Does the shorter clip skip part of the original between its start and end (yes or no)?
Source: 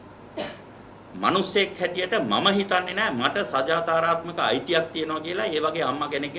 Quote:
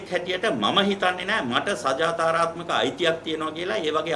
no